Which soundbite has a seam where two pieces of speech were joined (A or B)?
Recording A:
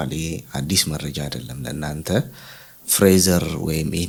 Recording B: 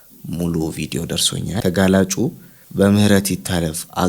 B